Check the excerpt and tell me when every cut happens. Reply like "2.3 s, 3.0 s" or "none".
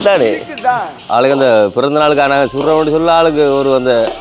1.0 s